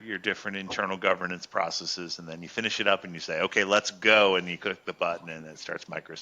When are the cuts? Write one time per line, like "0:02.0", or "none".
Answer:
none